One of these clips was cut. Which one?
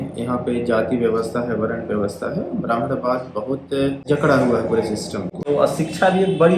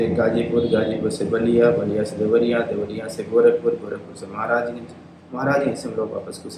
first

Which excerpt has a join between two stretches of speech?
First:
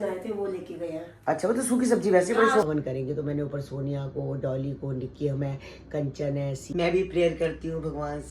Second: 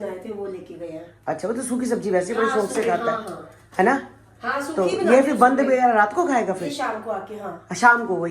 first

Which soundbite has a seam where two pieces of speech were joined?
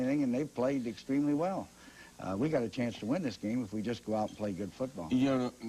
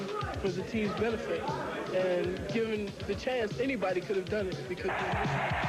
second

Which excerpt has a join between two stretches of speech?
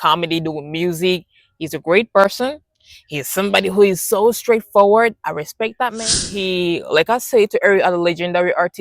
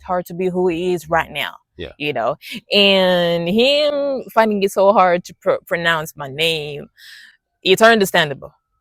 first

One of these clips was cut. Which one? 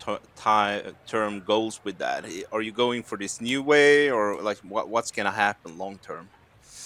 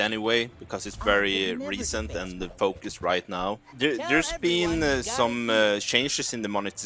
second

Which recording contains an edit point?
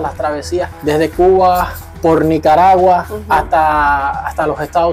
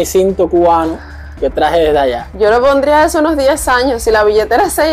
second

